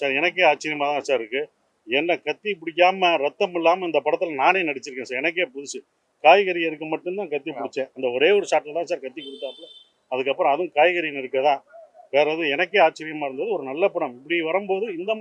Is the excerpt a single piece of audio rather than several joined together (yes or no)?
yes